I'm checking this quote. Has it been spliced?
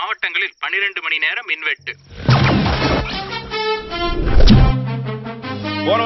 no; 0 cuts

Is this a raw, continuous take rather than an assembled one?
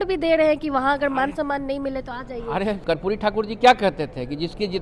no; 1 cut; at 2.8 s

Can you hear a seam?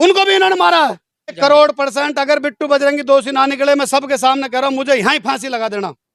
yes; 1 cut; at 1.4 s

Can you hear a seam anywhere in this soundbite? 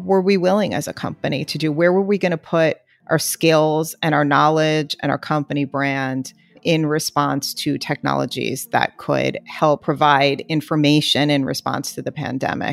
yes; 1 cut; at 9.8 s

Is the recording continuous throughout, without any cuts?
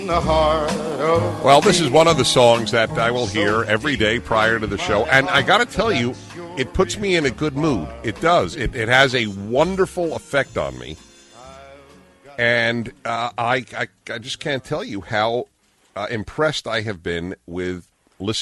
yes; 0 cuts

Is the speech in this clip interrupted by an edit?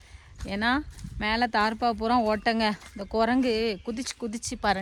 no; 0 cuts

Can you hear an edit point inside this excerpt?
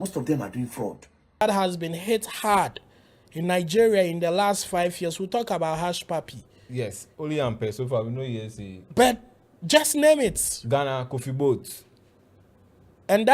yes; 1 cut; at 1.4 s

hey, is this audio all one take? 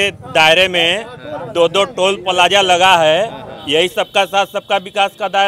yes; 0 cuts

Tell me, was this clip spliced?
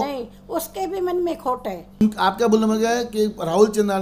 yes; 1 cut; at 2.0 s

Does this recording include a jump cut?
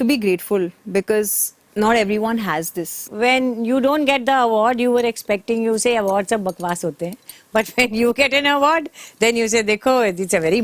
yes; 1 cut; at 3.0 s

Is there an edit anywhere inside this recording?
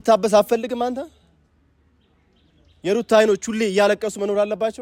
no; 0 cuts

